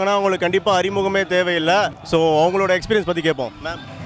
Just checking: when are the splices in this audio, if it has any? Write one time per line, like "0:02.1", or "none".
0:02.0